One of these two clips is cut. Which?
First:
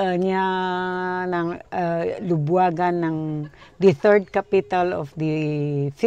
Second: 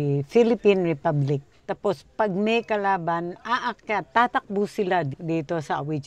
second; 2 cuts; at 1.5 s, 5.1 s

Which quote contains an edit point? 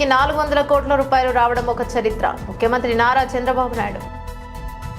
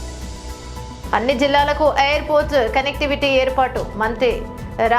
second; 1 cut; at 1.0 s

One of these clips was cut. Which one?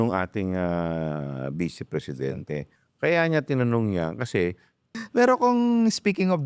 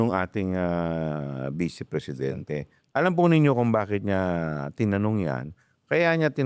first; 2 cuts; at 2.8 s, 4.9 s

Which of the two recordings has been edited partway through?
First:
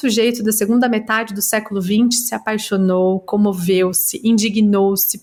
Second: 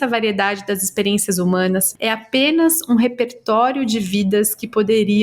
second; 1 cut; at 1.9 s

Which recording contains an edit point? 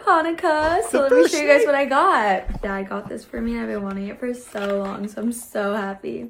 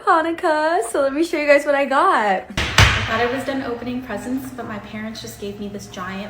second; 1 cut; at 2.6 s

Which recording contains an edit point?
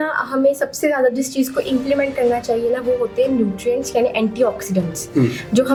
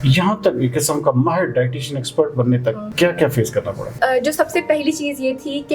second; 2 cuts; at 2.9 s, 4.0 s

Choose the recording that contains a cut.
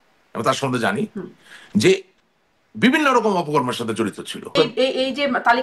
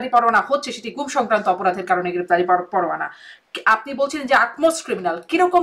first; 1 cut; at 4.5 s

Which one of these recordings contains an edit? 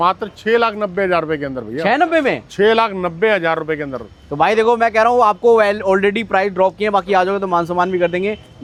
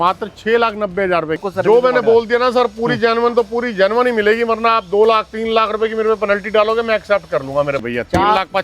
second; 2 cuts; at 1.5 s, 7.8 s

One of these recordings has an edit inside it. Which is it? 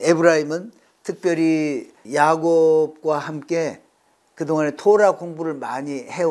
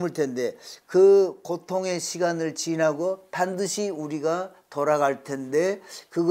first; 1 cut; at 2.0 s

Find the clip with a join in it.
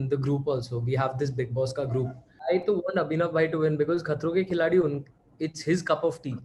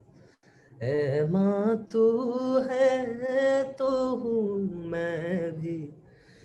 first; 1 cut; at 2.3 s

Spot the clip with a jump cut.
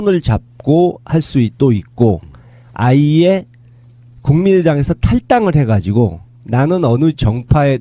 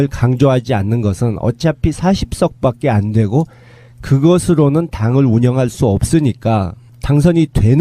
second; 1 cut; at 4.0 s

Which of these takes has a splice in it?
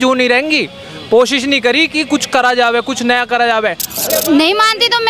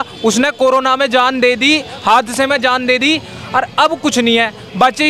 first; 1 cut; at 3.9 s

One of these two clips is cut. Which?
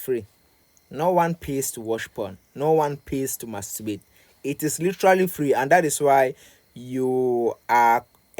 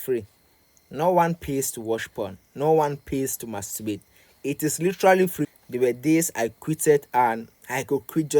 second; 1 cut; at 5.4 s

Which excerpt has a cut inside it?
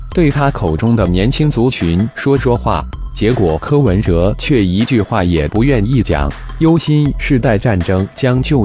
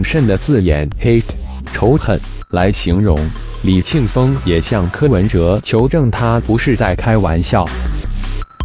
second; 1 cut; at 7.7 s

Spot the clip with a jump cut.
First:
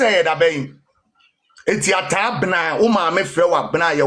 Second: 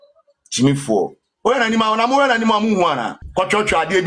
second; 1 cut; at 3.2 s

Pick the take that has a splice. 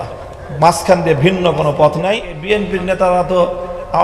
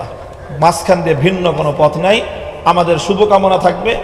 first; 1 cut; at 2.3 s

